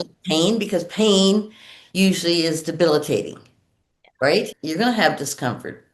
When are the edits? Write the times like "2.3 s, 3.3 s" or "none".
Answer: 4.6 s